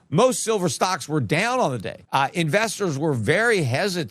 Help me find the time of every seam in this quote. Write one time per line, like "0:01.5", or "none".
0:02.0